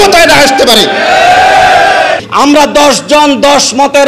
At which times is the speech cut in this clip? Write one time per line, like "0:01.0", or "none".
0:02.2